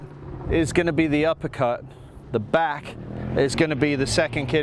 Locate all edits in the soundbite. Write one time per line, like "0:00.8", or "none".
none